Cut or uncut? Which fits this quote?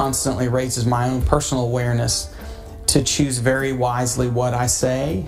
uncut